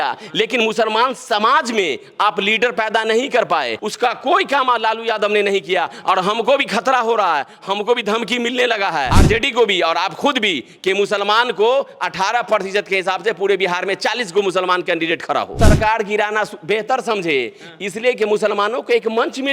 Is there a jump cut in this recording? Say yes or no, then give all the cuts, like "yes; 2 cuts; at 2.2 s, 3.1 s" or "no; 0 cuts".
yes; 3 cuts; at 3.8 s, 9.1 s, 15.5 s